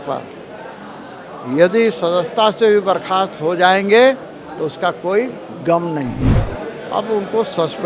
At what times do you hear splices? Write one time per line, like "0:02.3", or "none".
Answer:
0:06.3